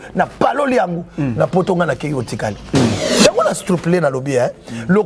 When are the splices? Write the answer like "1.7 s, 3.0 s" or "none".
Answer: 3.1 s